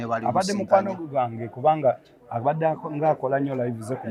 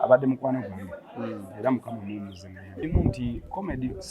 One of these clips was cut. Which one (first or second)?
second